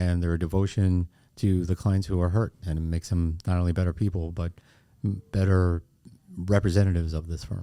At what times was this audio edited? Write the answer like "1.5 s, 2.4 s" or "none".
none